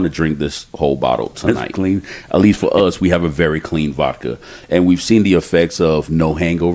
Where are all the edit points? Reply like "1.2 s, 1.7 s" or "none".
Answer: 1.4 s